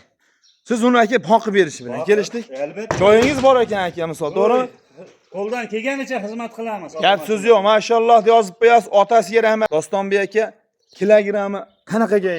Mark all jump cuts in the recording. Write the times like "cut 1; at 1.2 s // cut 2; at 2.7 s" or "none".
cut 1; at 9.7 s